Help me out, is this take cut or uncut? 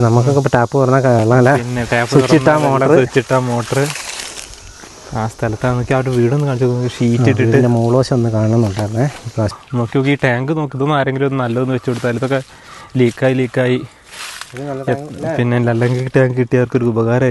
cut